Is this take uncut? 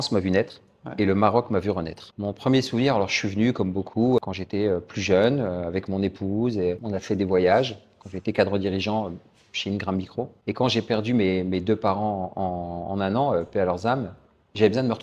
yes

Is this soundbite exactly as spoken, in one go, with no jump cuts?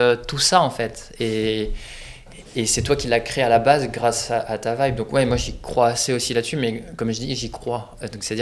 yes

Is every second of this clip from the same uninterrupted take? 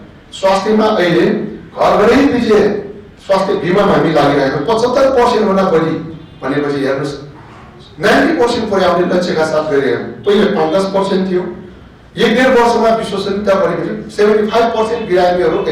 yes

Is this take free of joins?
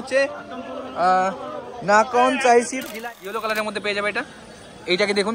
no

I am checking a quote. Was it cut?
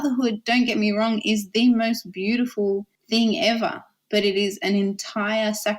yes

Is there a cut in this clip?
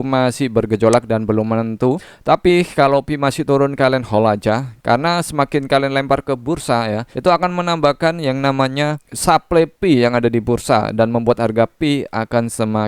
yes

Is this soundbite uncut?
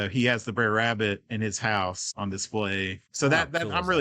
no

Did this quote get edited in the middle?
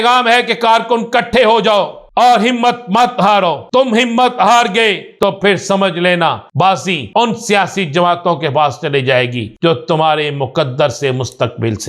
yes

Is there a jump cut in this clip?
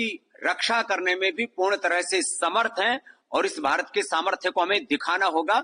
no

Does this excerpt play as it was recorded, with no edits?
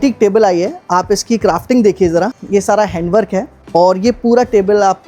yes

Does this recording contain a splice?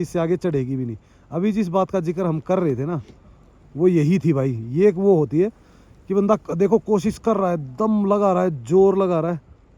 no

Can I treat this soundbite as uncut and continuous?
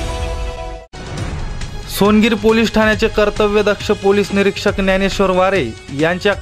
yes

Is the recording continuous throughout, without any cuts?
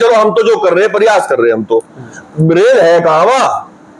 yes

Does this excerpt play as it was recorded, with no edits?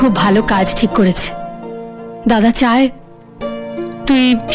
yes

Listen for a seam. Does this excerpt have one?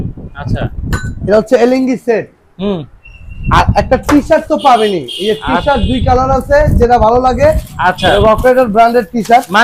no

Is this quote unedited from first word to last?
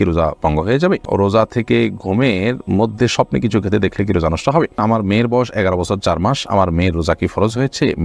no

